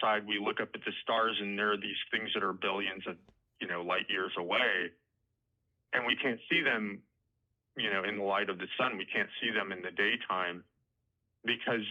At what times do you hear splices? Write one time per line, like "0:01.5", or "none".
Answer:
none

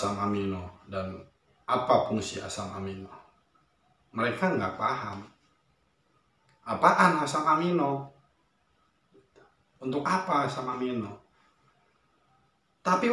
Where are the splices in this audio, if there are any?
none

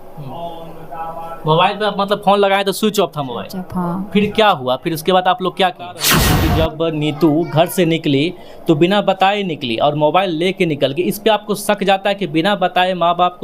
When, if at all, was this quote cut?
0:06.2

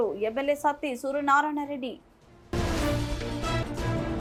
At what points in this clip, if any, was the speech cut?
none

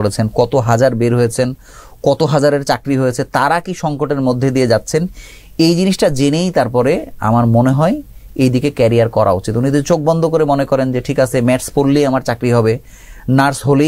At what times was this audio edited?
none

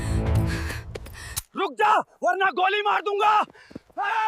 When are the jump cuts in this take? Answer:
0:01.3

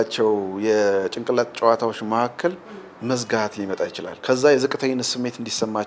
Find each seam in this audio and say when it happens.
0:04.1

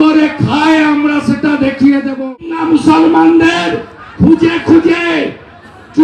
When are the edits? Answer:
0:02.2

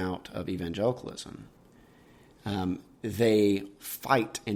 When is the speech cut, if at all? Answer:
none

